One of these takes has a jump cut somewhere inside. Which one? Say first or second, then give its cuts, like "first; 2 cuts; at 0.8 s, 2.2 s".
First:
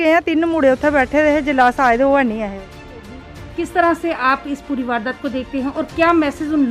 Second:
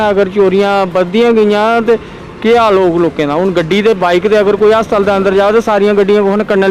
first; 1 cut; at 3.2 s